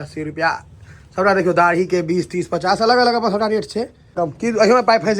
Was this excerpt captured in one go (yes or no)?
no